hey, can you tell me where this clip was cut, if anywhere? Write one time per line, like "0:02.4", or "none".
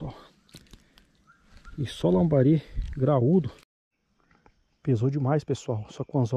0:03.6

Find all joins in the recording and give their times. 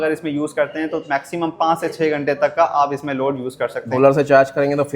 0:03.8

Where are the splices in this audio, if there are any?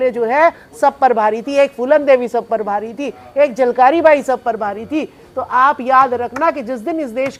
none

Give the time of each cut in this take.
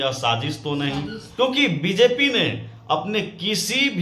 0:01.3

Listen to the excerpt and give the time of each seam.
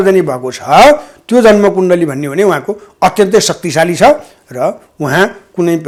none

